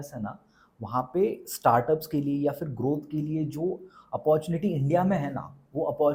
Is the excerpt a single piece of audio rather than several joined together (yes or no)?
yes